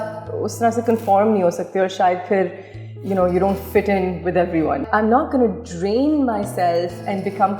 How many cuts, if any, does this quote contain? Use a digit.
1